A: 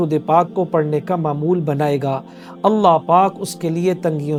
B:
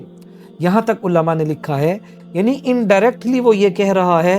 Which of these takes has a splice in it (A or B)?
B